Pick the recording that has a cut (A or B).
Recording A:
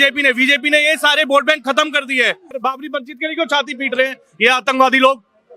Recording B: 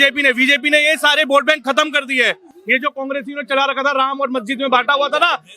A